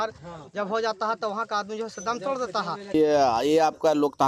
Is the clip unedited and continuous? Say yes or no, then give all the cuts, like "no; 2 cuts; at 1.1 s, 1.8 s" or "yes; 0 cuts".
no; 1 cut; at 2.9 s